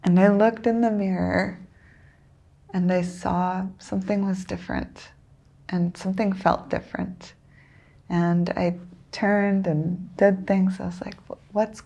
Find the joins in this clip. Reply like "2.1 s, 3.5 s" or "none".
none